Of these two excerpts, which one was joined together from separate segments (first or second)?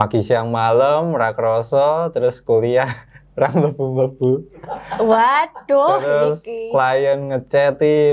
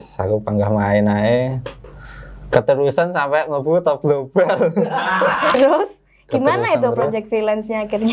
second